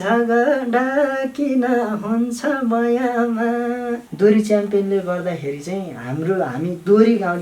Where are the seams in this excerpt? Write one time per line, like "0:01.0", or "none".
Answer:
0:04.0